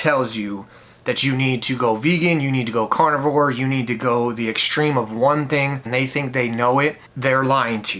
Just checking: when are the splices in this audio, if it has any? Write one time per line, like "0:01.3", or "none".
0:05.9
0:07.1